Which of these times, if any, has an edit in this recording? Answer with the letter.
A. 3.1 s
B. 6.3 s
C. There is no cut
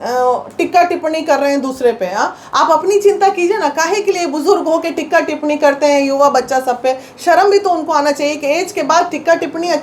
C